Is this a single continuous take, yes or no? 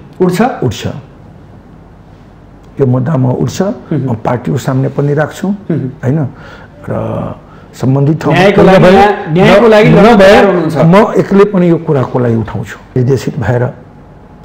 no